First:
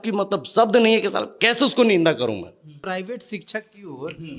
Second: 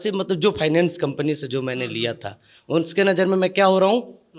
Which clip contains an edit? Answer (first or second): first